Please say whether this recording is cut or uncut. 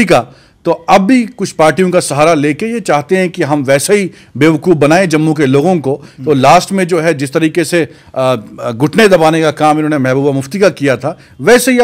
uncut